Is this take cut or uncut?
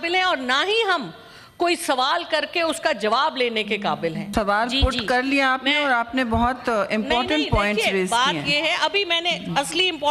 cut